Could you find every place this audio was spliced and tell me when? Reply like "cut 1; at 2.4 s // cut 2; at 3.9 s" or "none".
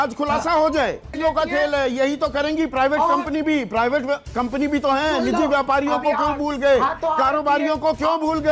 cut 1; at 1.2 s